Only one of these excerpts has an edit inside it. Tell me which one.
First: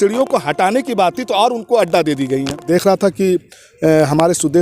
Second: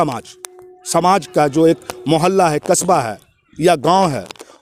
first; 1 cut; at 2.7 s

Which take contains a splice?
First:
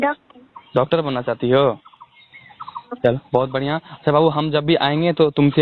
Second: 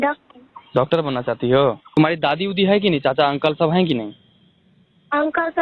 second; 1 cut; at 1.9 s

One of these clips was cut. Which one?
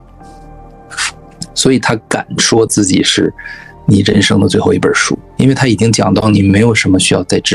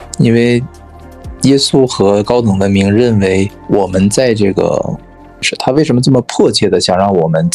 second; 2 cuts; at 3.6 s, 5.5 s

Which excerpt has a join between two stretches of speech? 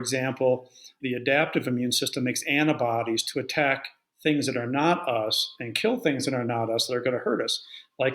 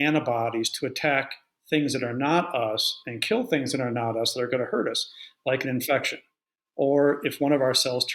first; 1 cut; at 0.9 s

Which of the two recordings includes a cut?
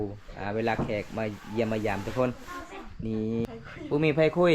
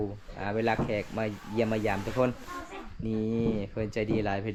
first; 1 cut; at 3.5 s

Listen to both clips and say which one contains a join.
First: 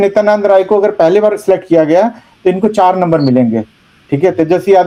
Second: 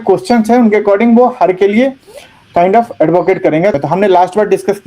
second; 1 cut; at 3.8 s

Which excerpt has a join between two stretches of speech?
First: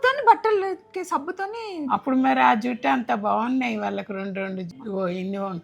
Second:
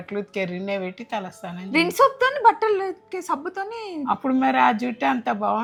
first; 1 cut; at 4.7 s

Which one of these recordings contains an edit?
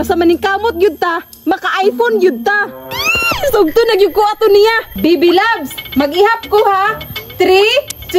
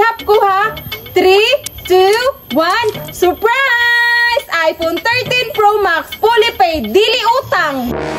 first; 1 cut; at 4.9 s

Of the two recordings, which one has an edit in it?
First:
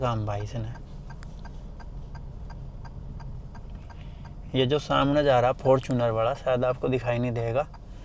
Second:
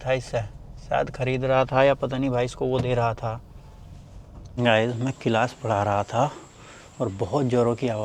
second; 1 cut; at 4.6 s

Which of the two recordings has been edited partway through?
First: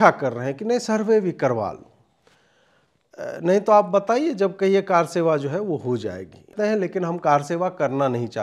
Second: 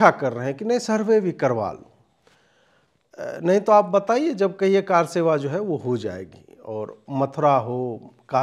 first; 1 cut; at 6.5 s

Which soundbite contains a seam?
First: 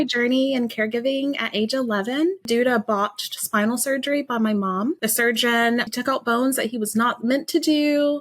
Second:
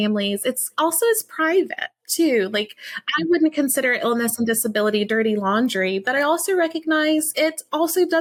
first; 2 cuts; at 2.5 s, 5.9 s

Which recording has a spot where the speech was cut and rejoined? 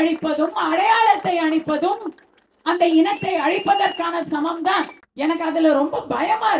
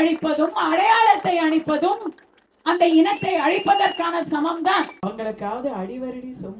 second; 1 cut; at 5.0 s

